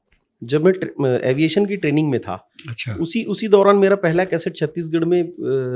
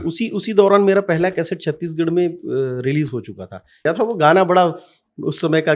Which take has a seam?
second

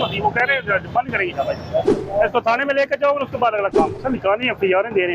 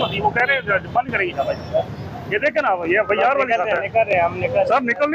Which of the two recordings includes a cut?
first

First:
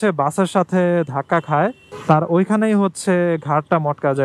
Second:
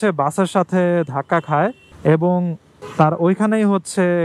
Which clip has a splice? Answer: first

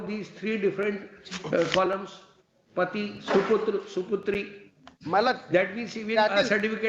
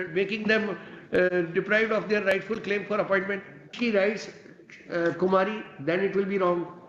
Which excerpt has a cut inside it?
second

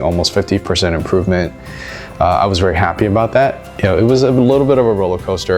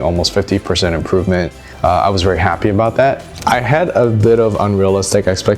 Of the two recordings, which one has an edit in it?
second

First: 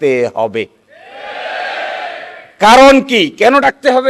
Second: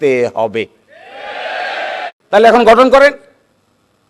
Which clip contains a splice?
second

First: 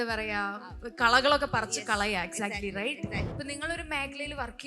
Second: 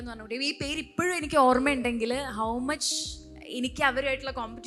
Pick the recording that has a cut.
first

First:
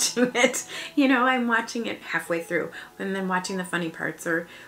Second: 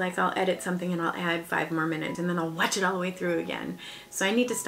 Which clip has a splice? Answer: second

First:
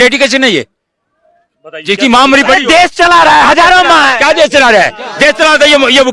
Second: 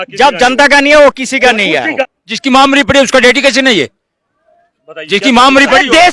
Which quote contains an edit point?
second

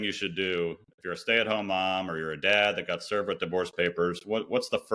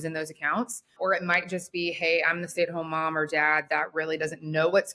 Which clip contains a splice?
second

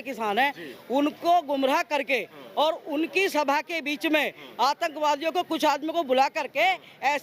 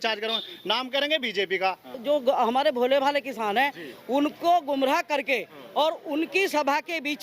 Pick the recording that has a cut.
second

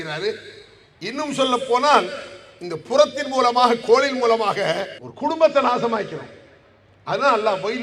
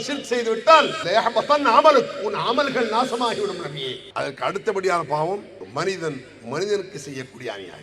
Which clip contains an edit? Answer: second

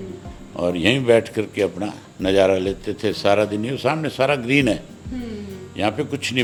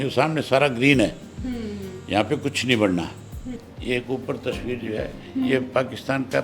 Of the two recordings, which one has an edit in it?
second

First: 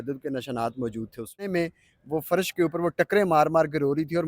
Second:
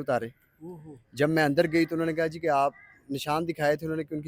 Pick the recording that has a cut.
first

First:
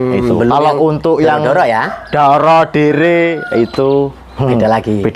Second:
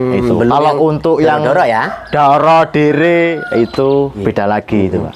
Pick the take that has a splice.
second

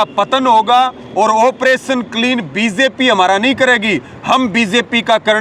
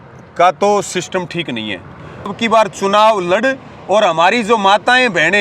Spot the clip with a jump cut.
second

